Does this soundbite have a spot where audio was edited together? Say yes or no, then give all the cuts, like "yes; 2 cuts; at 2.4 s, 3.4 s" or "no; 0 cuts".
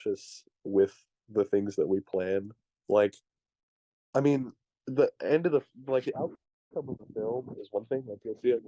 no; 0 cuts